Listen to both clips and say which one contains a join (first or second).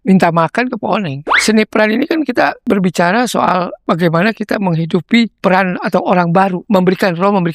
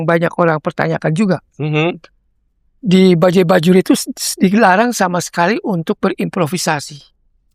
first